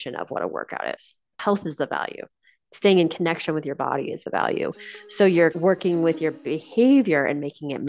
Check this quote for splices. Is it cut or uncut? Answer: cut